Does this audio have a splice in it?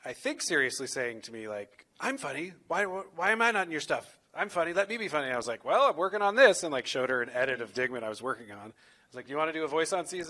no; 0 cuts

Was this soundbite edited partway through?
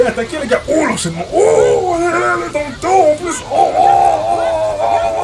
no; 0 cuts

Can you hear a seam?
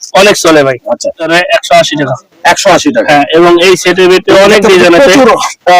yes; 1 cut; at 1.2 s

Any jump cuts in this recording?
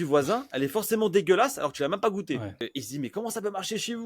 yes; 1 cut; at 2.7 s

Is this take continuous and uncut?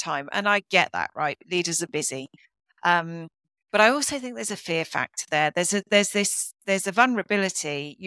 yes; 0 cuts

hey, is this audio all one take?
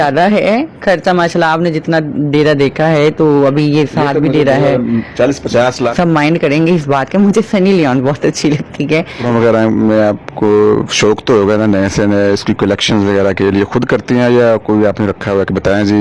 no; 2 cuts; at 5.9 s, 9.1 s

